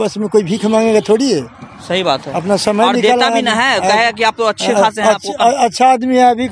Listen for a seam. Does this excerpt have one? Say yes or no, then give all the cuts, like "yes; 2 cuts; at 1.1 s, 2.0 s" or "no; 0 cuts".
no; 0 cuts